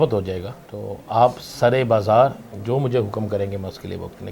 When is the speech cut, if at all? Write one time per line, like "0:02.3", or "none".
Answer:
none